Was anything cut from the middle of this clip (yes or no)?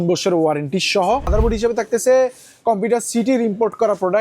yes